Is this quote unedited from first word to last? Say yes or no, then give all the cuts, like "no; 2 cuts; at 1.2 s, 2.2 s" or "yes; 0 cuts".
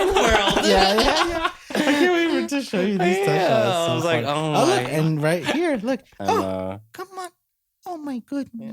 yes; 0 cuts